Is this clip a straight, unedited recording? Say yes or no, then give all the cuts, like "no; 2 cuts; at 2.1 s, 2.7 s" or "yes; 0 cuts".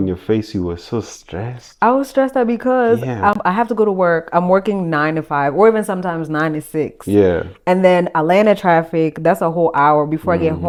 yes; 0 cuts